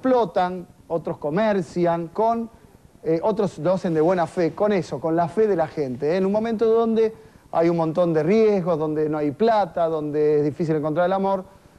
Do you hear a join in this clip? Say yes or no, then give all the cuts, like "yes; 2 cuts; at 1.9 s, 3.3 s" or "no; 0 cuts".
yes; 1 cut; at 7.3 s